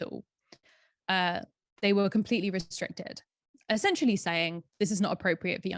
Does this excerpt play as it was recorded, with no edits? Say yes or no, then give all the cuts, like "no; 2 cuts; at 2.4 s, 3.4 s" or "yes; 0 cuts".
yes; 0 cuts